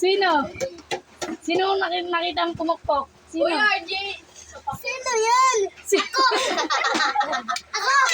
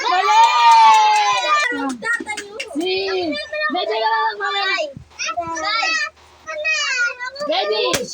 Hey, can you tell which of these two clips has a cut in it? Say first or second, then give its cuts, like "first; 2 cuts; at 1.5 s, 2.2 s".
second; 1 cut; at 1.6 s